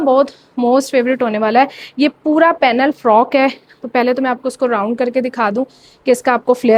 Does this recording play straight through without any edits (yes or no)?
yes